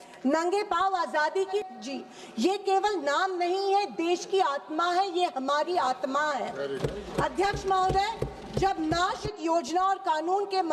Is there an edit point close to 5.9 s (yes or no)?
no